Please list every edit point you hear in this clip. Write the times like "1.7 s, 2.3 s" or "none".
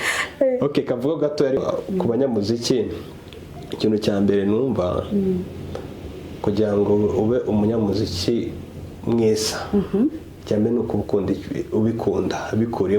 1.6 s